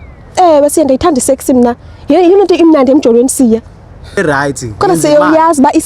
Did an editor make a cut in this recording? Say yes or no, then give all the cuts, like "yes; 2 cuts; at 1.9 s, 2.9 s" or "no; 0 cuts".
yes; 1 cut; at 4.2 s